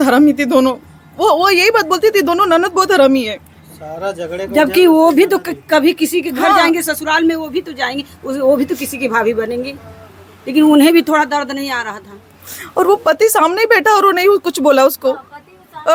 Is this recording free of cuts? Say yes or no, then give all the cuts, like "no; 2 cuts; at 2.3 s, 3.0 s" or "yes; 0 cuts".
yes; 0 cuts